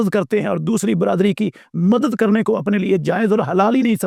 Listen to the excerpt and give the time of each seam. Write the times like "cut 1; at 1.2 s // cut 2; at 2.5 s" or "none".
none